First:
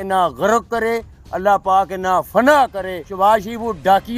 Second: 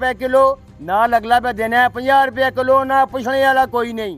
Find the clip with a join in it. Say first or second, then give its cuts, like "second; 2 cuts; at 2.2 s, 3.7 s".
first; 1 cut; at 2.5 s